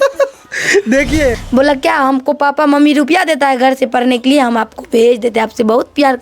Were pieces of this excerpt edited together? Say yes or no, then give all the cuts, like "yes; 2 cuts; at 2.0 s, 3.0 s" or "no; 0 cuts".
yes; 1 cut; at 1.4 s